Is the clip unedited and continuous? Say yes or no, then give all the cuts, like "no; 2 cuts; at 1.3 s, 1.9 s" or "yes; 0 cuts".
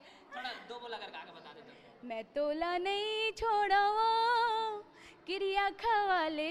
yes; 0 cuts